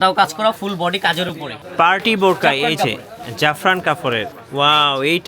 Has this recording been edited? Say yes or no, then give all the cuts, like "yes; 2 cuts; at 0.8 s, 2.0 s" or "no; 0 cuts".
yes; 2 cuts; at 1.5 s, 4.4 s